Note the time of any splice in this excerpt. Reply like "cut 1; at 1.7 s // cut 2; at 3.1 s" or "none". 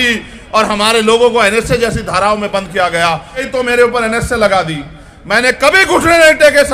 cut 1; at 3.5 s